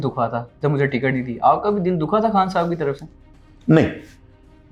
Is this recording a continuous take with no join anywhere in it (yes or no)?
yes